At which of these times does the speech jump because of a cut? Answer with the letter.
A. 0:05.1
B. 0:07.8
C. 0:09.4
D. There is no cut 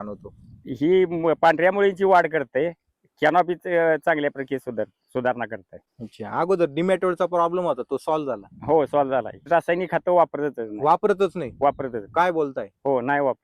C